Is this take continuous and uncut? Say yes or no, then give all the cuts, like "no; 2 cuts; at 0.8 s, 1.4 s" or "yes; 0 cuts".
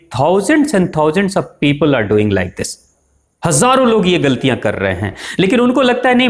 yes; 0 cuts